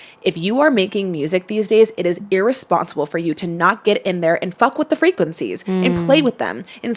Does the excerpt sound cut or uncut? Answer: cut